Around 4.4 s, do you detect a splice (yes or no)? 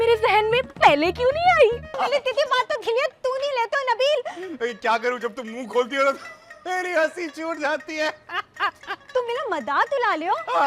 no